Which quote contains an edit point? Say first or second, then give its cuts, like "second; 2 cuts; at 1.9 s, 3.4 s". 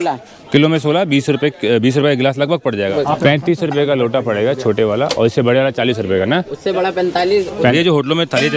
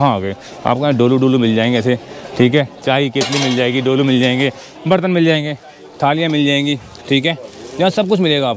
first; 2 cuts; at 2.9 s, 7.7 s